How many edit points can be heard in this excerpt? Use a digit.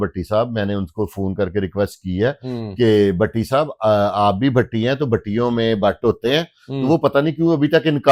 0